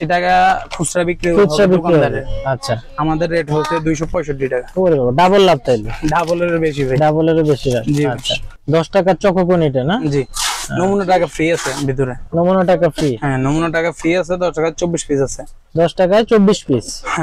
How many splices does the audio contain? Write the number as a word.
zero